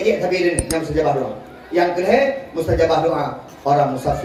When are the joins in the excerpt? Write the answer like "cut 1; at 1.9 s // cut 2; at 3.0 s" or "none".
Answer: none